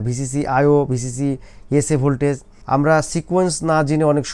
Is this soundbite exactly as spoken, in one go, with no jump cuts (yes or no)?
no